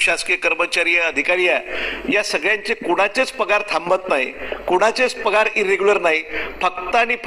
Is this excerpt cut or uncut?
uncut